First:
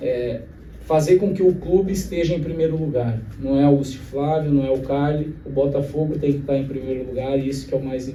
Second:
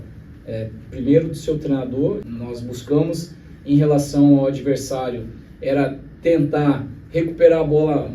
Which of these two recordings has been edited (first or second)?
second